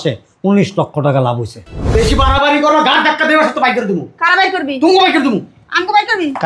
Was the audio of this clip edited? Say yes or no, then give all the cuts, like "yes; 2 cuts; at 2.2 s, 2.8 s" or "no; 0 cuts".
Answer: yes; 1 cut; at 1.7 s